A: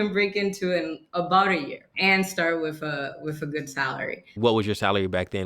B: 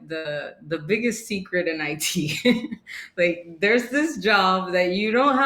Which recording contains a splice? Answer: A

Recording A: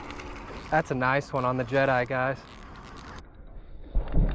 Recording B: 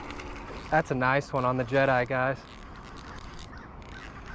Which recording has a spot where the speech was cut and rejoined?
A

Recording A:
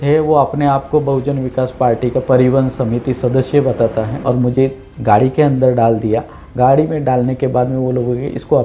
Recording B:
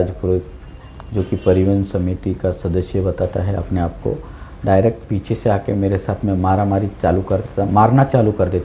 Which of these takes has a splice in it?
A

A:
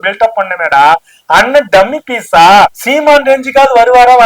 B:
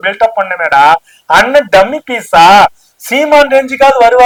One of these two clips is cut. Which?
A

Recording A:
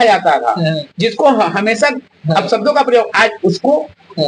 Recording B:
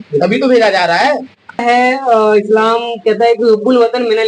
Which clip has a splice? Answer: B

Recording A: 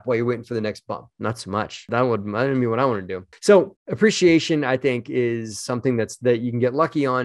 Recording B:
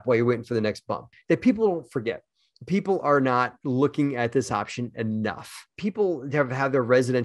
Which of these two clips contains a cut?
B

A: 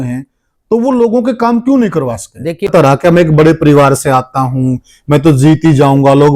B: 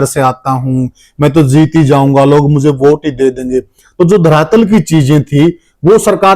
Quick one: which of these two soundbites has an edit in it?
A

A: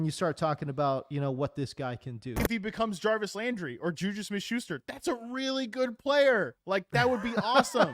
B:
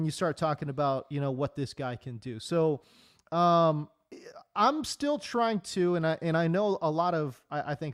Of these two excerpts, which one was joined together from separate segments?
A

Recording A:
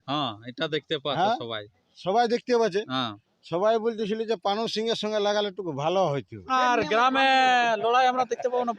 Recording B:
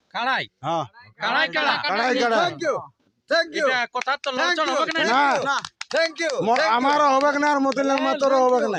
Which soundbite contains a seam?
A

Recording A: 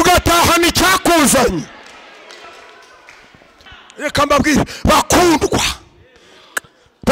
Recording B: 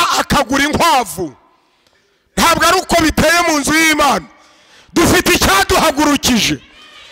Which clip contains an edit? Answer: A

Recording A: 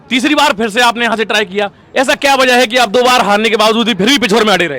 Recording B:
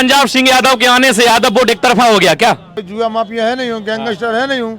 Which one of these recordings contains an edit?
B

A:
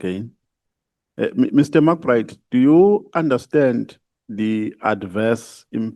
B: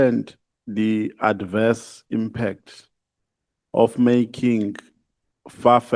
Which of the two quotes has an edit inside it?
A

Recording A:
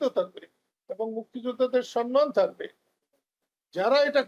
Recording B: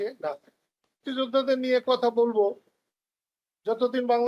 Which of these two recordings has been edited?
B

